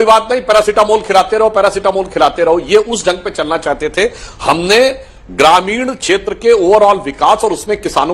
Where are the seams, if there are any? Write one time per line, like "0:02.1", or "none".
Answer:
none

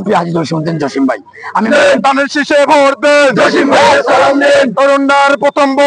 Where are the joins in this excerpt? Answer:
0:01.6

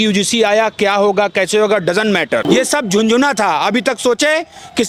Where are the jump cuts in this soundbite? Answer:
0:02.4

